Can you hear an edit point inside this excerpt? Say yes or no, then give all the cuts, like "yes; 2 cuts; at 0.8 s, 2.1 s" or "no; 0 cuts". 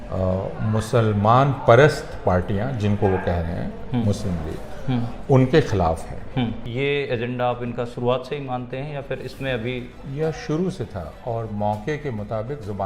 yes; 1 cut; at 6.6 s